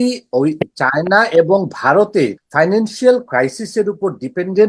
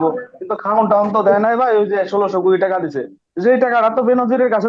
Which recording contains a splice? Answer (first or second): first